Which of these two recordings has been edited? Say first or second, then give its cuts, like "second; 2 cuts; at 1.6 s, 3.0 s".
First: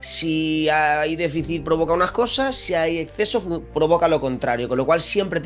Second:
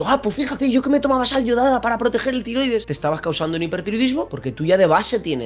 second; 2 cuts; at 2.9 s, 4.4 s